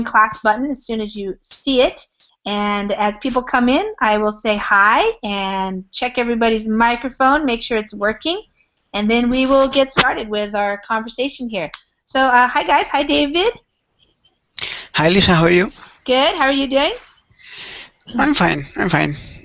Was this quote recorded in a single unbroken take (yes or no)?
no